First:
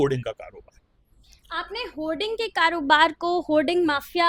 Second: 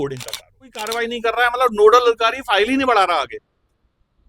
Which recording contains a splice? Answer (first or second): second